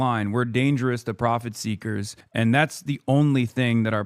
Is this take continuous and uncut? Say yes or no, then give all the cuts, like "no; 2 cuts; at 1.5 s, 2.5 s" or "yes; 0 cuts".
no; 1 cut; at 2.2 s